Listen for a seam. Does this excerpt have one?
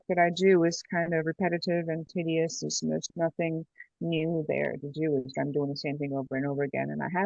no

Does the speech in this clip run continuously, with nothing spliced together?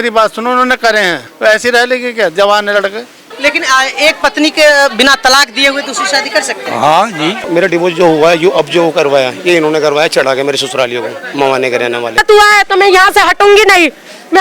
no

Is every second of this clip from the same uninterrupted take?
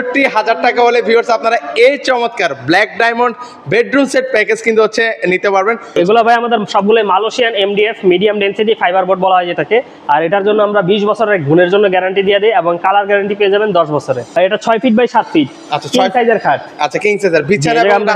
no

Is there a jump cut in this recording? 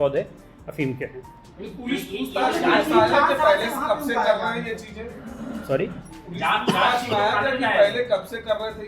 no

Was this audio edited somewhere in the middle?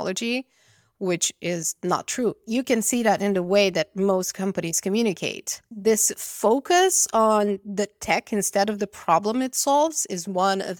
yes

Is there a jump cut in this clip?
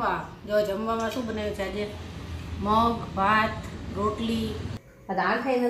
yes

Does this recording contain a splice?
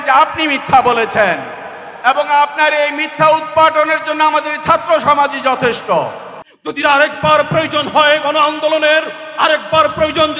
yes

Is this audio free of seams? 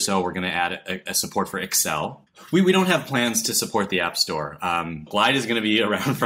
no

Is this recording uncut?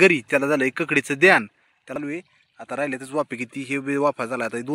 no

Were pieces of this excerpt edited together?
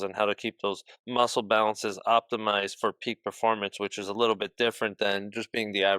no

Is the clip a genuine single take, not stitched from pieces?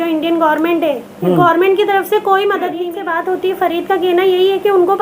no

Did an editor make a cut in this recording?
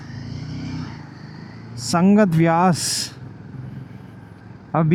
no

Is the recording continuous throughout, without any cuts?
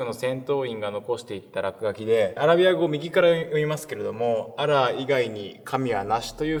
yes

